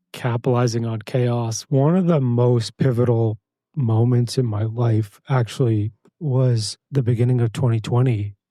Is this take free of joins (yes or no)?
no